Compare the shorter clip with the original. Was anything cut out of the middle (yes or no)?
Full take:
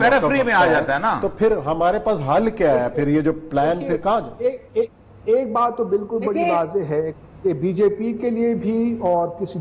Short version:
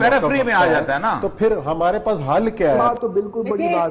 yes